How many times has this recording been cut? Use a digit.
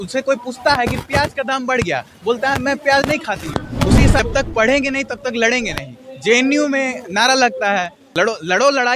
2